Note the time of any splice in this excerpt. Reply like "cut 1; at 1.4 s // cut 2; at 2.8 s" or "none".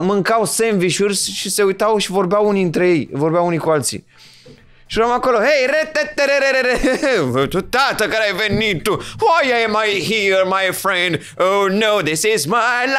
none

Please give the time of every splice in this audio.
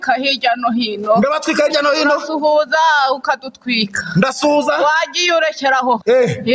none

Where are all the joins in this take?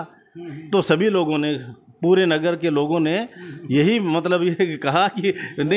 none

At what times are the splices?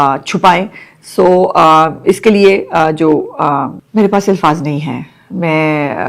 cut 1; at 3.8 s

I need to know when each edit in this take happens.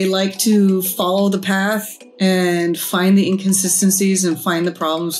none

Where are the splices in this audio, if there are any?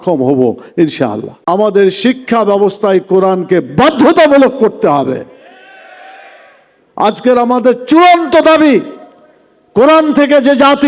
cut 1; at 1.3 s

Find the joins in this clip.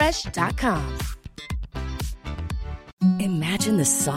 cut 1; at 2.9 s

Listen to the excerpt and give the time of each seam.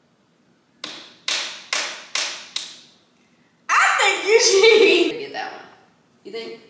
cut 1; at 5.1 s

